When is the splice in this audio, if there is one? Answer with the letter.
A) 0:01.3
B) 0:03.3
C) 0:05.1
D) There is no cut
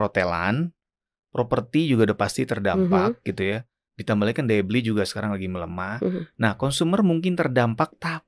D